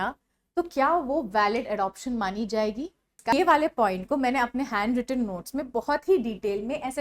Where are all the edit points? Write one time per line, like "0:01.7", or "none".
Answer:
0:03.3